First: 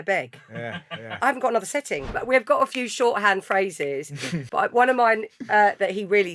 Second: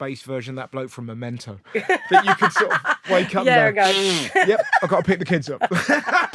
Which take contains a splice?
first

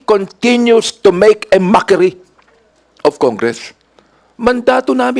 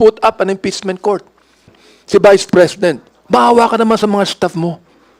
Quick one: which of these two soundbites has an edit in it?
second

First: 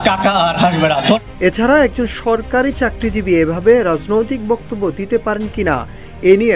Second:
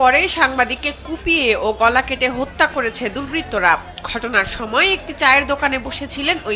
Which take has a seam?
first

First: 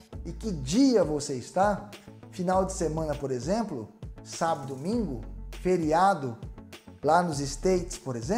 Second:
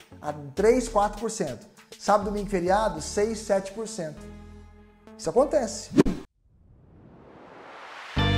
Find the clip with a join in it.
second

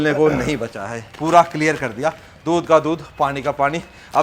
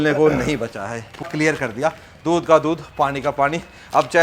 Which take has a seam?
second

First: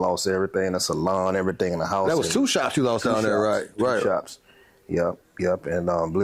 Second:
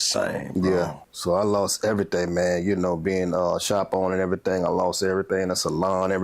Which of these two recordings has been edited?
second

